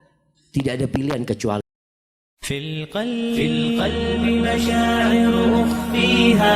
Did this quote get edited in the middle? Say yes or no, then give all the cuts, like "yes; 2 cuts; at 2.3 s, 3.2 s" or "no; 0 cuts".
yes; 1 cut; at 1.6 s